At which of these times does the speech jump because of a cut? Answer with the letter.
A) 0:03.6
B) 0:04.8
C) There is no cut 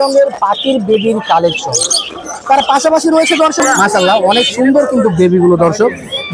A